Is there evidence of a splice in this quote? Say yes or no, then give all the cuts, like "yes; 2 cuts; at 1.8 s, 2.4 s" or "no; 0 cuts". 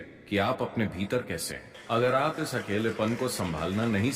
yes; 1 cut; at 1.7 s